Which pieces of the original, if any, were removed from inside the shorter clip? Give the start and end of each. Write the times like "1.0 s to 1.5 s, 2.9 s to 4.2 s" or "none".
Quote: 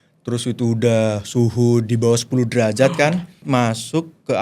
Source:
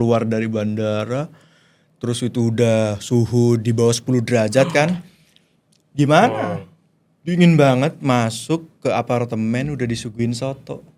5.2 s to 8.0 s